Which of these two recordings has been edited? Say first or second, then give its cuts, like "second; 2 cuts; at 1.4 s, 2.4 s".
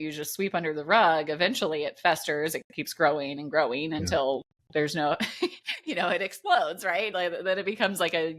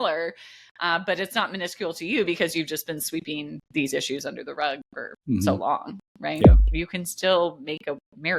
second; 1 cut; at 6.6 s